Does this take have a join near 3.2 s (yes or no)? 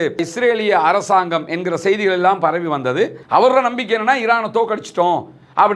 yes